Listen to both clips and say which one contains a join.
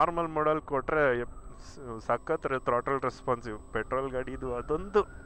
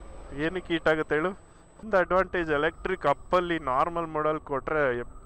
second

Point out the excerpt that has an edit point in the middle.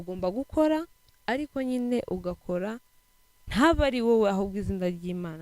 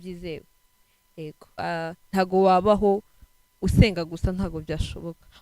second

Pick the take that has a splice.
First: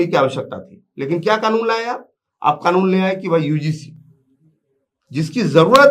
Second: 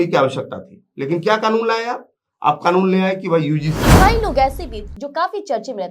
second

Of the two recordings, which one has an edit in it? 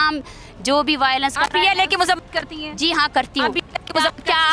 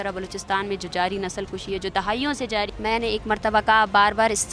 second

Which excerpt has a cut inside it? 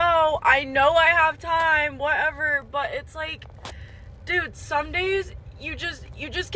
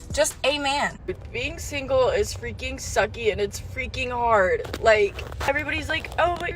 second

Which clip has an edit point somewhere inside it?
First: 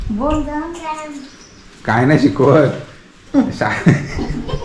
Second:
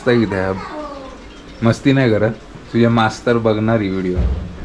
second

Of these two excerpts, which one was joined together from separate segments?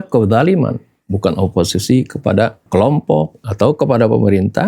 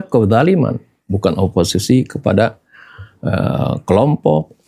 first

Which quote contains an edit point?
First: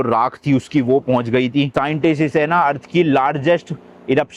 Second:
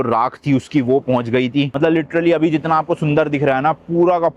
first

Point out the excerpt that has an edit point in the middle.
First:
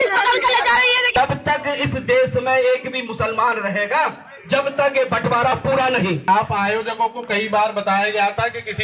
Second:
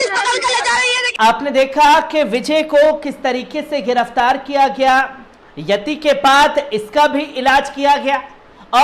first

